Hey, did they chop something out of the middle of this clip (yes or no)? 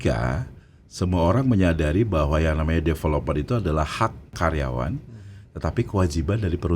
yes